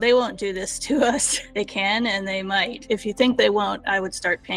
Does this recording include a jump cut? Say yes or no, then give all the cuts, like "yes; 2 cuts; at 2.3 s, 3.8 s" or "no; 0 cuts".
yes; 2 cuts; at 1.4 s, 2.8 s